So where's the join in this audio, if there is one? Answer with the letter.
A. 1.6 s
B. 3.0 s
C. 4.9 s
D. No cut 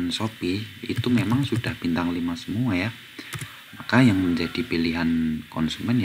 D